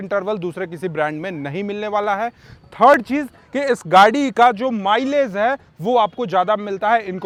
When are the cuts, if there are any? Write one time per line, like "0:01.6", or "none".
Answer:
none

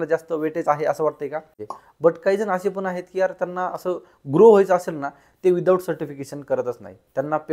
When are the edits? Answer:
0:01.7

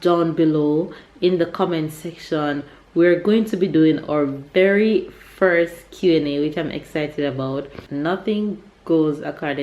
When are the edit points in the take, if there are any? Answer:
0:07.8

